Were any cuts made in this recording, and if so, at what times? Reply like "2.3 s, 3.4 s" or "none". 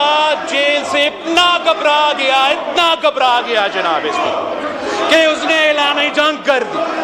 none